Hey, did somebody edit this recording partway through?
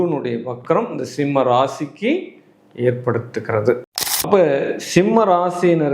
yes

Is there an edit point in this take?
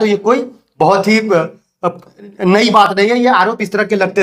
no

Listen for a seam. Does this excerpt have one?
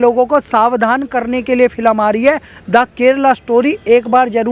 no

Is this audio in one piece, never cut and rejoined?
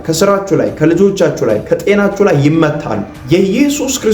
no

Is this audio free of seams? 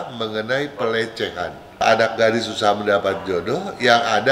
no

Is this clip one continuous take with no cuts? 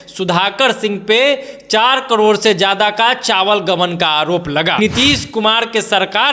no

